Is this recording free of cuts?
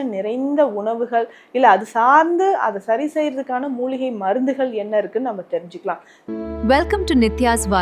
no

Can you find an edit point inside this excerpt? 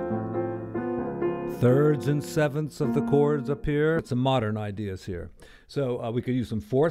yes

